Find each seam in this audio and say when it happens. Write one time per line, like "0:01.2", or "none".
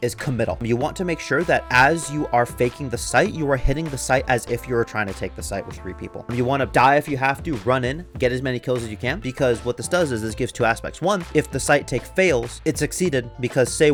none